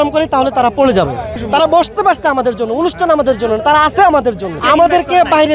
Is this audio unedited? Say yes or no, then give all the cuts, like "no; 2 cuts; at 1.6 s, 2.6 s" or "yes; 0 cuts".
no; 2 cuts; at 1.3 s, 4.6 s